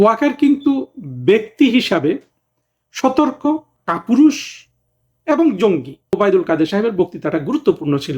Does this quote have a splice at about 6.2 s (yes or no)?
yes